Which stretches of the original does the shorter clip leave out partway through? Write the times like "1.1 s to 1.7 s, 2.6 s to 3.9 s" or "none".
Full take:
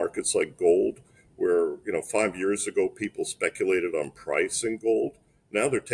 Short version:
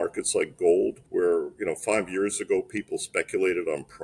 1.0 s to 1.3 s